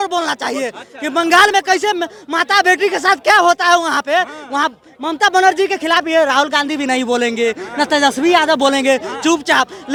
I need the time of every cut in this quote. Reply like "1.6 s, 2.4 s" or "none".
none